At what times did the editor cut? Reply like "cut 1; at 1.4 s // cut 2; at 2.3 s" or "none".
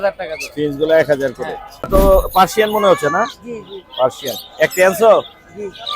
cut 1; at 1.9 s

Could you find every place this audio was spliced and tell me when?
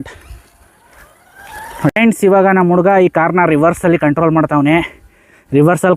cut 1; at 1.9 s

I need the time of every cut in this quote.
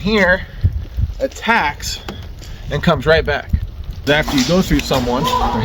cut 1; at 4.1 s

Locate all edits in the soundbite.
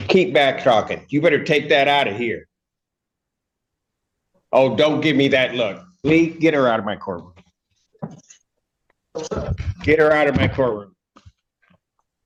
none

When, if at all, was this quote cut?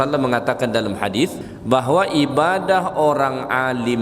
cut 1; at 1.5 s

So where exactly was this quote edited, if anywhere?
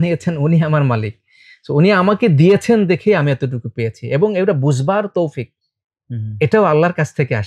none

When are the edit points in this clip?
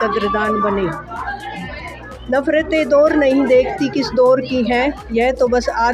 none

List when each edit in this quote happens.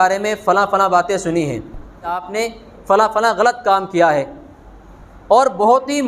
cut 1; at 2.3 s

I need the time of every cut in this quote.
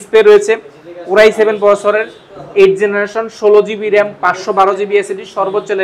none

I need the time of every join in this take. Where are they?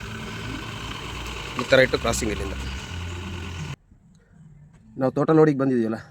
cut 1; at 3.8 s

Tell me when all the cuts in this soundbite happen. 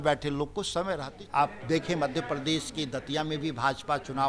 cut 1; at 1.1 s

